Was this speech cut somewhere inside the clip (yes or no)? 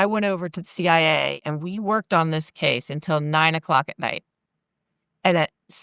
yes